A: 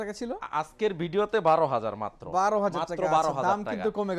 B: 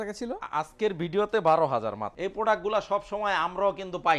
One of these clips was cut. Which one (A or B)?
B